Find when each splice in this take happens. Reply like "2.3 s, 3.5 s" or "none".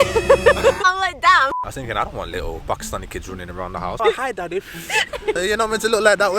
0.8 s, 1.5 s, 4.0 s